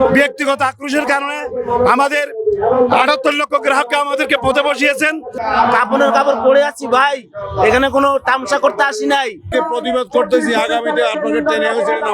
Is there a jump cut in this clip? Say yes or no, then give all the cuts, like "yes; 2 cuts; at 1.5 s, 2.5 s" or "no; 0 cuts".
yes; 2 cuts; at 5.4 s, 9.5 s